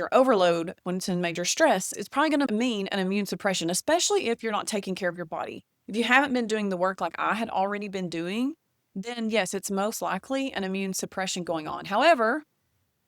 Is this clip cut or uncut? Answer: cut